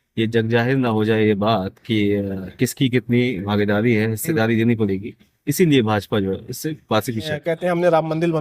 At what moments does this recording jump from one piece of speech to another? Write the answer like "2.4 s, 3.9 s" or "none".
7.3 s